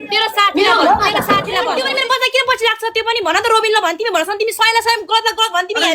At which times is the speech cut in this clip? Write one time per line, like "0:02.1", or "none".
0:01.7